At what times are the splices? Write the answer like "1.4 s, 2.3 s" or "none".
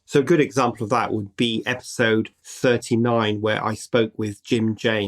2.4 s